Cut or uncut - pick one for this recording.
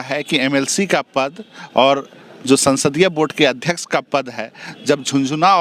uncut